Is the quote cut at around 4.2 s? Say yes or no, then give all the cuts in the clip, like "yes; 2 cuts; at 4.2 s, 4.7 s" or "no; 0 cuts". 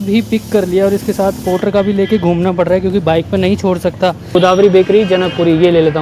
yes; 1 cut; at 4.2 s